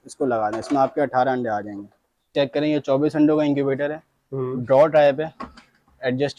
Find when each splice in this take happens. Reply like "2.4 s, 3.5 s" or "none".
2.3 s

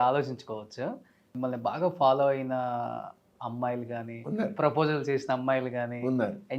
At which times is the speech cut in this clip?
1.3 s

